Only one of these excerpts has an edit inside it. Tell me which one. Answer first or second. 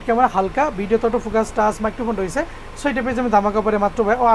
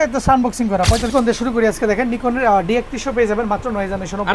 second